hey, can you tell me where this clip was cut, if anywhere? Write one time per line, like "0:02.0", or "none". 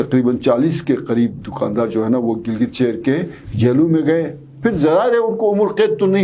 none